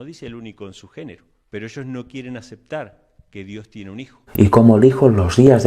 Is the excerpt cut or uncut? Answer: cut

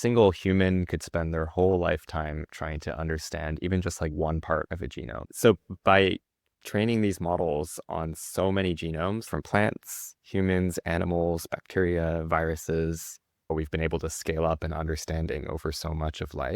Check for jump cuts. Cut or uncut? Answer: cut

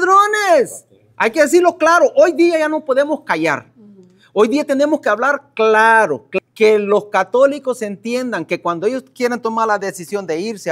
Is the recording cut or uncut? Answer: cut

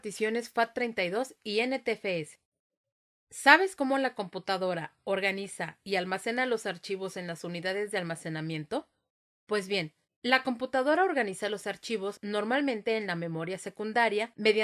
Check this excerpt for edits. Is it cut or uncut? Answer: cut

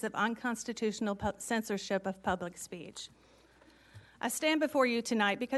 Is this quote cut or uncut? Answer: uncut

